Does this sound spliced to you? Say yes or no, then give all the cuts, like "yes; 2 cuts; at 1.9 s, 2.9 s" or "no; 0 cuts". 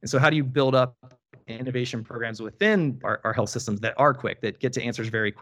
no; 0 cuts